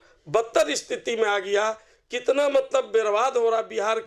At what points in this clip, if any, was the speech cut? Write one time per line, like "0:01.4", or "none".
none